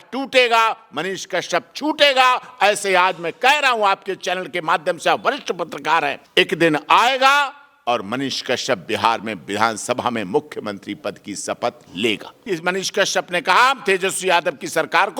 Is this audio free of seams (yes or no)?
no